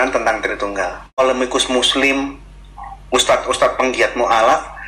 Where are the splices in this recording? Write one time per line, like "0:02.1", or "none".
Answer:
0:01.2